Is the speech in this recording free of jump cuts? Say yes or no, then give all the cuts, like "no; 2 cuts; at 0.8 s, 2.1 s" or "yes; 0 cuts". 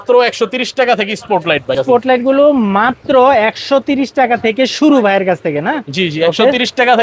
yes; 0 cuts